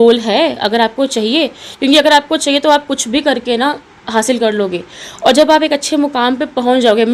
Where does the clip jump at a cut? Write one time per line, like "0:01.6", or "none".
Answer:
none